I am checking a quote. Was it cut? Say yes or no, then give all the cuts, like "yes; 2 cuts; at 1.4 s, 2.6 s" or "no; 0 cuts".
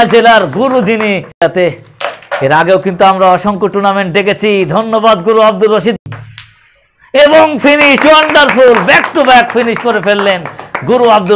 yes; 2 cuts; at 1.3 s, 6.0 s